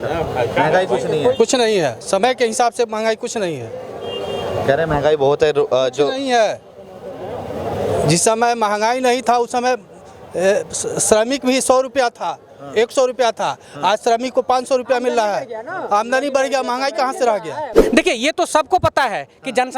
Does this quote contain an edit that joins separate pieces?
yes; 1 cut; at 17.8 s

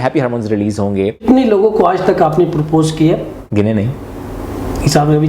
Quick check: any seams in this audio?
yes; 2 cuts; at 1.2 s, 3.4 s

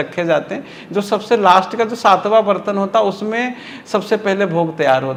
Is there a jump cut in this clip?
no; 0 cuts

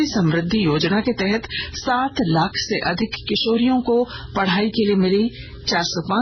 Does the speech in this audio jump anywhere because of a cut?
no; 0 cuts

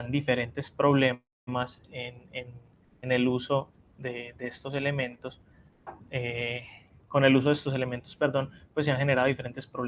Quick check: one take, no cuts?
yes; 0 cuts

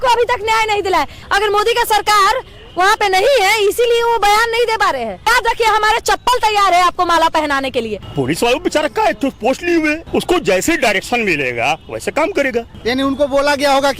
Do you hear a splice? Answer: yes; 5 cuts; at 1.2 s, 5.3 s, 8.0 s, 10.0 s, 12.7 s

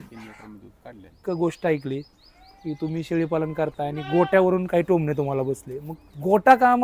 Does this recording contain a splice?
yes; 1 cut; at 1.2 s

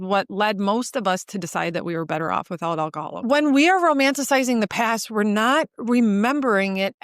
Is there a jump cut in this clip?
yes; 1 cut; at 3.2 s

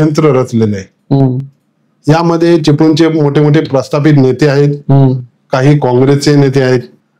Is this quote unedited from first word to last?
yes; 0 cuts

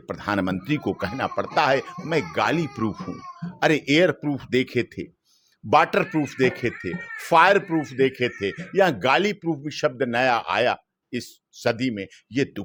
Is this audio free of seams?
yes; 0 cuts

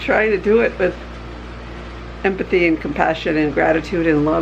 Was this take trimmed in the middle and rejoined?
no; 0 cuts

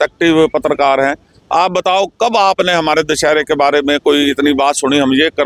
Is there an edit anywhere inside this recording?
no; 0 cuts

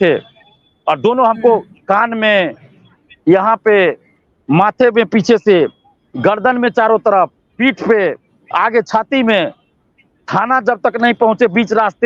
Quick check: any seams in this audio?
no; 0 cuts

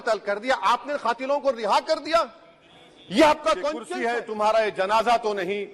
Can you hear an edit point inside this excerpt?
yes; 1 cut; at 3.9 s

